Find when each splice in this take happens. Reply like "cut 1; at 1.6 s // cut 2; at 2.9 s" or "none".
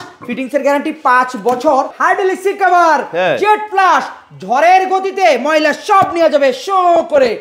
cut 1; at 2.0 s